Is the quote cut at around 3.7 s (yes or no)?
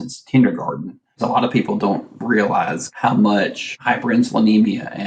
yes